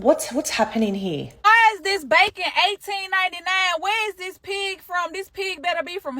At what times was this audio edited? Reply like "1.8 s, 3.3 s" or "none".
1.5 s